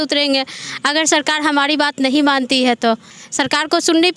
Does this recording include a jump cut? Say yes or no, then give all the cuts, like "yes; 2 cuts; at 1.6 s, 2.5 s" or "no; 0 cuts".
yes; 1 cut; at 3.2 s